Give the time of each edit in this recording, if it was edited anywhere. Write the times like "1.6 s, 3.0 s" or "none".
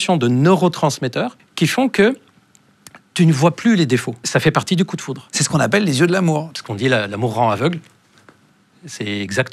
1.4 s, 4.2 s, 6.5 s